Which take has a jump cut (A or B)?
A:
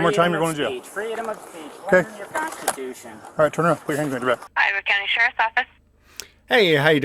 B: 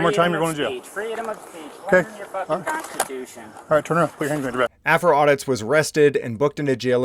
A